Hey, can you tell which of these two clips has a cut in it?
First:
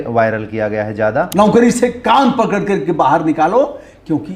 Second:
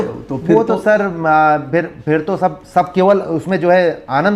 first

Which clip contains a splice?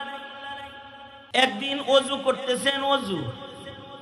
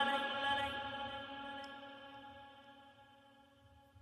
first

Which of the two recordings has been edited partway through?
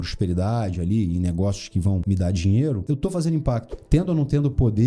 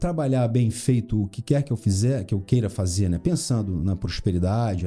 first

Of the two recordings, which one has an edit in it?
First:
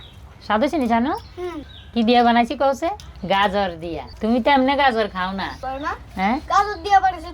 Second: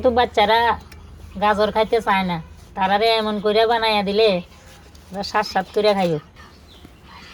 first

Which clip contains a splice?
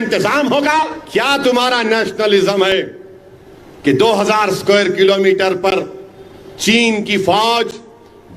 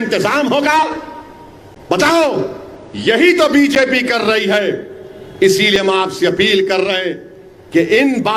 first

